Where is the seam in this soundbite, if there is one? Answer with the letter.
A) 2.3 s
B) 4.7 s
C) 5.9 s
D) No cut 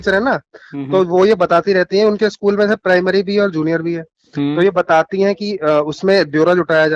D